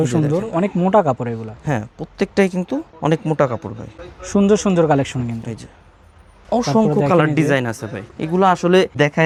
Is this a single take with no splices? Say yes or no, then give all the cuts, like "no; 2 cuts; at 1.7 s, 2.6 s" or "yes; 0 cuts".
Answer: yes; 0 cuts